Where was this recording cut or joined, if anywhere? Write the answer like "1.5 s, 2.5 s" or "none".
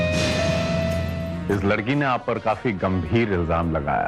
1.4 s